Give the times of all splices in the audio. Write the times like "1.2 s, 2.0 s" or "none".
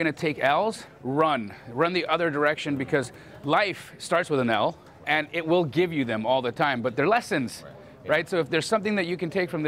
0.9 s, 5.0 s